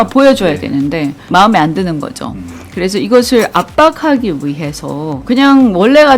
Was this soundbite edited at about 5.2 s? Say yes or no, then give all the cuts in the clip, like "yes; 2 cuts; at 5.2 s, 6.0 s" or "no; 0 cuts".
yes; 1 cut; at 5.2 s